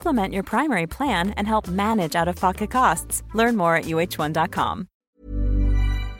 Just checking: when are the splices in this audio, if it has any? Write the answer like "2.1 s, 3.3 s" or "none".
4.9 s